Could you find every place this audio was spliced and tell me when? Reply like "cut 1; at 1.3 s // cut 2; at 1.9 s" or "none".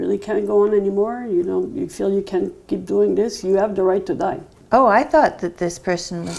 cut 1; at 4.5 s